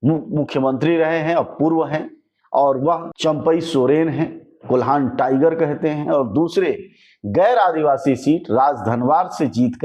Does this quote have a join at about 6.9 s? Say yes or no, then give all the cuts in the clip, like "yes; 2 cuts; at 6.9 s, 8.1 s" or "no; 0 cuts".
no; 1 cut; at 3.1 s